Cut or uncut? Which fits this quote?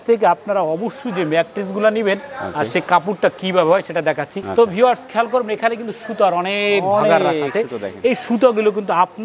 uncut